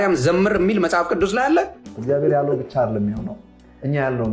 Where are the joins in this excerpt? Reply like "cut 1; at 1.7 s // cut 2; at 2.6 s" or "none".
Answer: cut 1; at 1.9 s